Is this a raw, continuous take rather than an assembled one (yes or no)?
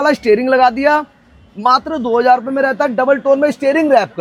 yes